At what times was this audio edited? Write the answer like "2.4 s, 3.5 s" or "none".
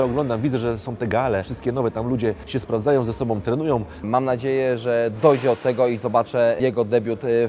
1.5 s, 2.4 s, 4.1 s, 6.6 s